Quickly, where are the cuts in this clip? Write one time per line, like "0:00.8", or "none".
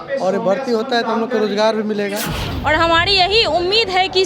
0:02.5